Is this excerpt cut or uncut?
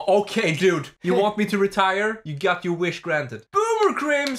cut